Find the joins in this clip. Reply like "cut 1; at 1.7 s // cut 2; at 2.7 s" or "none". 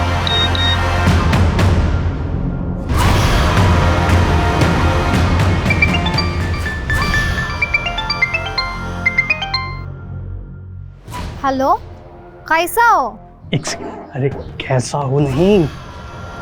cut 1; at 6.7 s